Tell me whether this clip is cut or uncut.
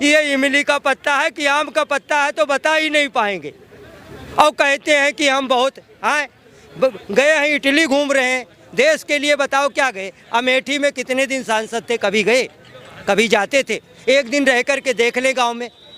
uncut